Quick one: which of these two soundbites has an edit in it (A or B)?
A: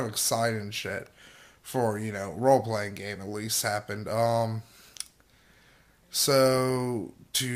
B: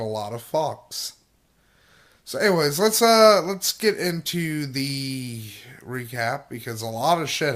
B